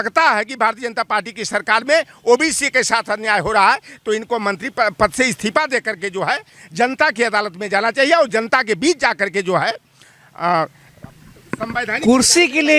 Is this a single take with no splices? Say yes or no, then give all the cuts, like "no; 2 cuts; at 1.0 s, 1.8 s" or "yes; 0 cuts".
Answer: yes; 0 cuts